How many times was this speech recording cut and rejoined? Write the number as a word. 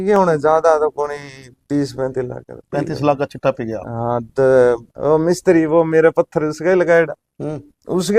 one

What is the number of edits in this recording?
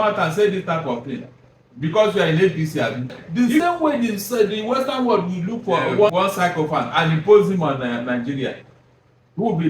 two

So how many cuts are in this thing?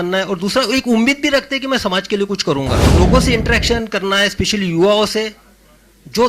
one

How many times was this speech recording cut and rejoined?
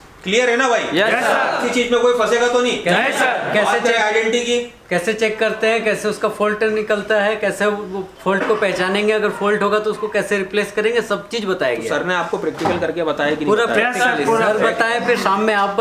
zero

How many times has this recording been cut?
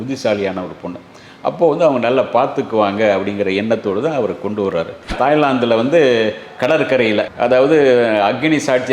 one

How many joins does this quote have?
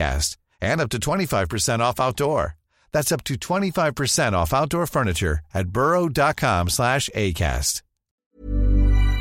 zero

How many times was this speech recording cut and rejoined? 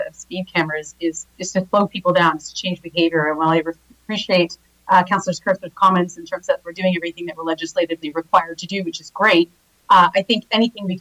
zero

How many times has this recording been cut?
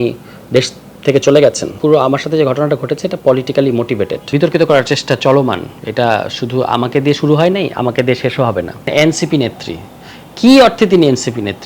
three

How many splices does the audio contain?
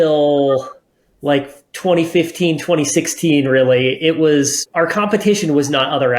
one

